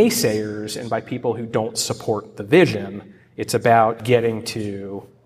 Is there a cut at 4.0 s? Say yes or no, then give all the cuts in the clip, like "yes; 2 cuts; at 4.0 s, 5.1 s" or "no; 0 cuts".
yes; 1 cut; at 4.0 s